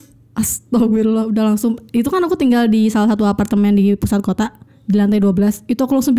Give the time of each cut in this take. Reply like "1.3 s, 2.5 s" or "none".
none